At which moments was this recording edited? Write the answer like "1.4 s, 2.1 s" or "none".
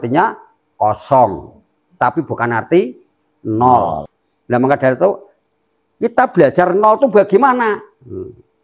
4.1 s